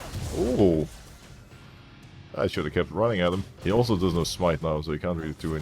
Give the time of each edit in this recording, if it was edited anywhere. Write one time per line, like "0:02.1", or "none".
0:03.5